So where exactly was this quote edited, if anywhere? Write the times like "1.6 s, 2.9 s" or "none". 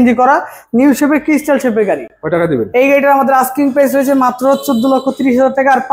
none